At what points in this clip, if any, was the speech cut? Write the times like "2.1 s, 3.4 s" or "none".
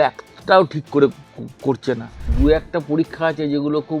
2.2 s

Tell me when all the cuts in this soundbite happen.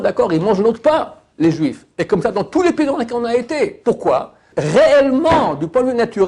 4.5 s

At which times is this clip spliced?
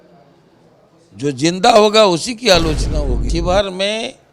3.2 s

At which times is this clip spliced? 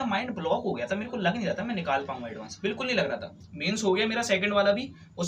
none

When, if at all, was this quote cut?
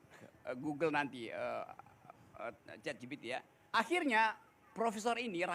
3.6 s

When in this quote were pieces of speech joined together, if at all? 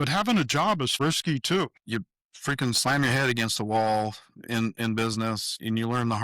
1.0 s, 1.8 s

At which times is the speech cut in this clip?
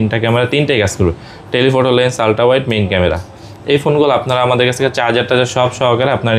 none

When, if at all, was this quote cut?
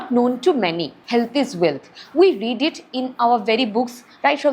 0.9 s

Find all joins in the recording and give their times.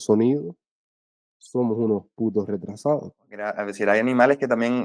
3.6 s

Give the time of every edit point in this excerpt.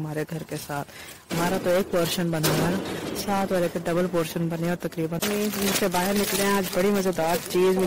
5.2 s

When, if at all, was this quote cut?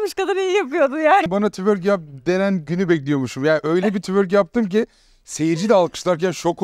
1.3 s

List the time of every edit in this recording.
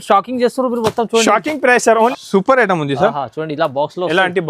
2.1 s

